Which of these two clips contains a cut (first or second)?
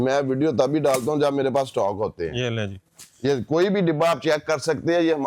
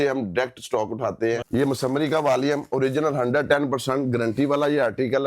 second